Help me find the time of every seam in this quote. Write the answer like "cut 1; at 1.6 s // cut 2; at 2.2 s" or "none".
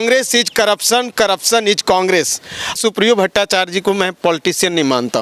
cut 1; at 2.8 s